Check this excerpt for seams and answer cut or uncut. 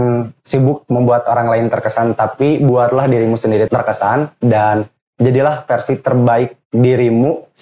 cut